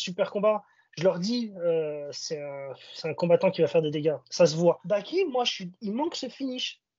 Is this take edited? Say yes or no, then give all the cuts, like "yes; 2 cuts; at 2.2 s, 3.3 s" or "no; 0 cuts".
yes; 1 cut; at 4.8 s